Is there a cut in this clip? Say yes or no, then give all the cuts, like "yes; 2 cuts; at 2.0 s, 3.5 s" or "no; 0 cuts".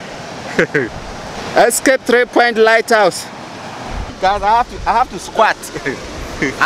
yes; 2 cuts; at 1.3 s, 4.0 s